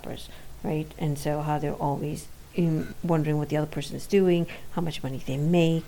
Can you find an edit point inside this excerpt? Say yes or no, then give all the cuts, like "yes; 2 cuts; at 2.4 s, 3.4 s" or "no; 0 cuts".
yes; 1 cut; at 2.9 s